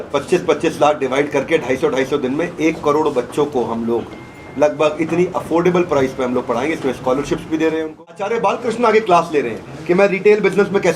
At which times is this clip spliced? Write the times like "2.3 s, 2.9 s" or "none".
8.3 s